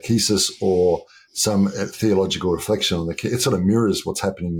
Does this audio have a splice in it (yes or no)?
no